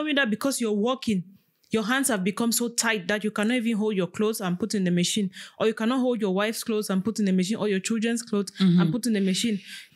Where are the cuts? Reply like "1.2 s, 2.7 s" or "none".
none